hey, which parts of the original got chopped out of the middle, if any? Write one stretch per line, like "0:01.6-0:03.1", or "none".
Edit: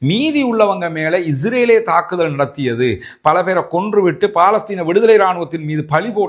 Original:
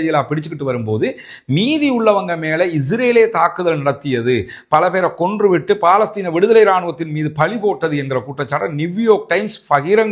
none